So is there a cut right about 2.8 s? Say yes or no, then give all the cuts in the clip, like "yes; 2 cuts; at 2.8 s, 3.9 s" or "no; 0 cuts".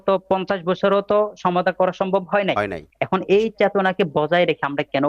yes; 1 cut; at 2.8 s